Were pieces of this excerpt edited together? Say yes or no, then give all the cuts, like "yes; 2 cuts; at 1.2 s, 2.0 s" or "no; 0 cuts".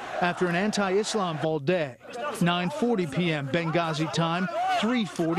no; 0 cuts